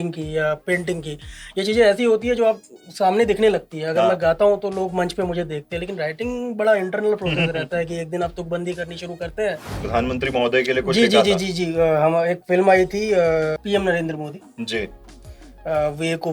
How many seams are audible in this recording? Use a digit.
2